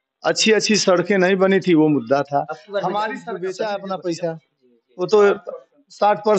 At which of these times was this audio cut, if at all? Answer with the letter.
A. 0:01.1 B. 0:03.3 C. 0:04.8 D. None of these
B